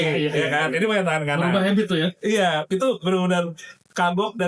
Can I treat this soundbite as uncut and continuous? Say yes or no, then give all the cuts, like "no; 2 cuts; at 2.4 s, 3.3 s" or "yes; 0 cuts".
yes; 0 cuts